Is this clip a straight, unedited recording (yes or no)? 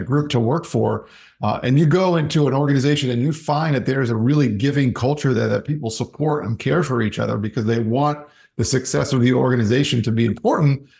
yes